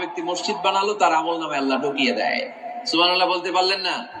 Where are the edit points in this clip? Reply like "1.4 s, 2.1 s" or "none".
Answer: 2.8 s